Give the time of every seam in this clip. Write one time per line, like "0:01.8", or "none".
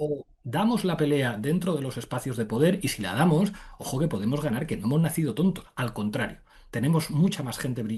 none